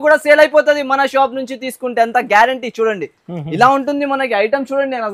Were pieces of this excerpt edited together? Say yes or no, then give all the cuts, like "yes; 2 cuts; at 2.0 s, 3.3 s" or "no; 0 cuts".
no; 0 cuts